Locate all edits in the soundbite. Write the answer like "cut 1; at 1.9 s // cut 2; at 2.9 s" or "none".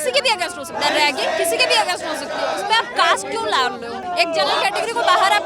cut 1; at 4.0 s